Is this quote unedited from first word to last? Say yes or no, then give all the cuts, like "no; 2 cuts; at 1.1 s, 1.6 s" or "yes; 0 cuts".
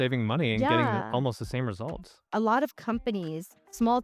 no; 1 cut; at 2.3 s